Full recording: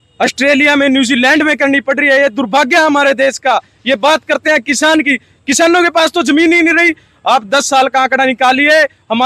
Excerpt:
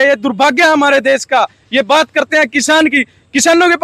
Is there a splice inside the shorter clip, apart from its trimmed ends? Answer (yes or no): no